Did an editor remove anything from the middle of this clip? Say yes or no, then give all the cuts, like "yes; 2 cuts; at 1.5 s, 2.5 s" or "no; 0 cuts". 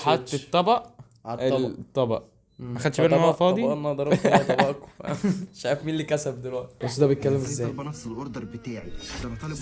no; 0 cuts